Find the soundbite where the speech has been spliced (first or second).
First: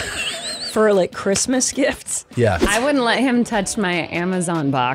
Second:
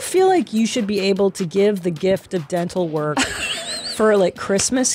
first